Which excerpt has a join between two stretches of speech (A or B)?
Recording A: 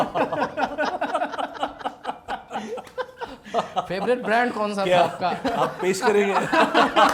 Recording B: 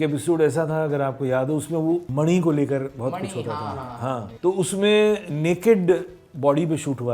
B